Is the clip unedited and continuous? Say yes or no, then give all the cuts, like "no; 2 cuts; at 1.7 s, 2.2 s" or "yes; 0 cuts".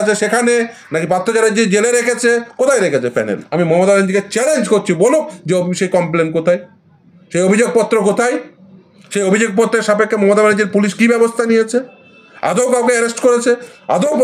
no; 1 cut; at 3.4 s